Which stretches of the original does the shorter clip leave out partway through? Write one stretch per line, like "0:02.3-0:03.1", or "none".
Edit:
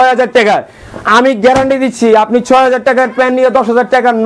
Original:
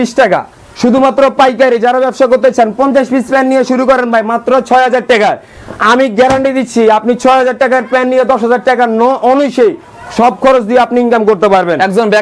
none